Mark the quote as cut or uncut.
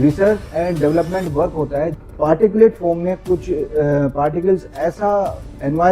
cut